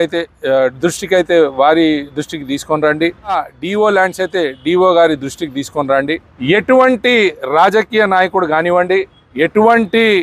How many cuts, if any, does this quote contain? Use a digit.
3